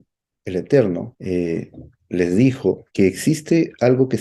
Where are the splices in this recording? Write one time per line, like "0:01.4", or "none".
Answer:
0:01.1
0:02.9